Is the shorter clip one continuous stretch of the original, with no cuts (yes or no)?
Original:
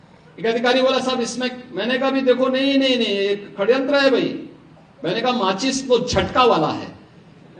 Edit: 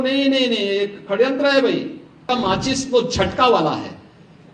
no